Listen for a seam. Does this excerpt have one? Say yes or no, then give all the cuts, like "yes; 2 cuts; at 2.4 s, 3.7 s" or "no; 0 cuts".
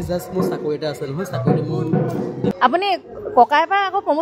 yes; 1 cut; at 2.6 s